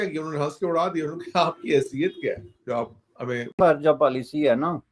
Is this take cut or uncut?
cut